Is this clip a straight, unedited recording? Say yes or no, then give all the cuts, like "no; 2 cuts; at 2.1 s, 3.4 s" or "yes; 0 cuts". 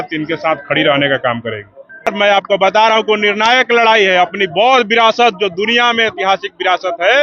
no; 1 cut; at 2.1 s